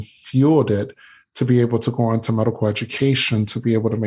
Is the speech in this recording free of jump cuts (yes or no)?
yes